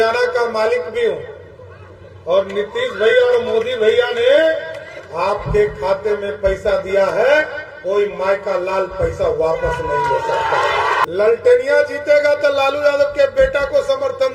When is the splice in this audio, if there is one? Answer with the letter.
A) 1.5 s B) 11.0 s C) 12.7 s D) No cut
B